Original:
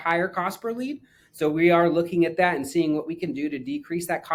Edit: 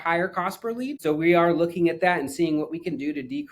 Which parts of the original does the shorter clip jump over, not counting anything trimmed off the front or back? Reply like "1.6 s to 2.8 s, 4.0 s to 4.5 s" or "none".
0.9 s to 1.3 s